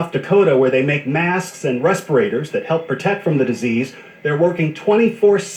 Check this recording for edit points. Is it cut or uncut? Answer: uncut